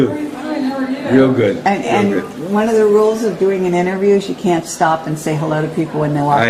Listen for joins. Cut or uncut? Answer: uncut